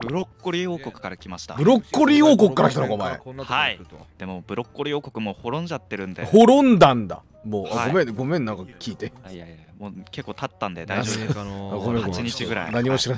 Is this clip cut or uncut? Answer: uncut